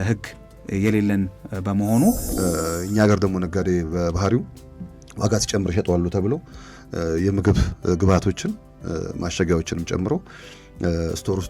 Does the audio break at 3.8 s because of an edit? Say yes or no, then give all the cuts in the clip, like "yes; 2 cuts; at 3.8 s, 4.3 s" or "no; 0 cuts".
no; 1 cut; at 2.3 s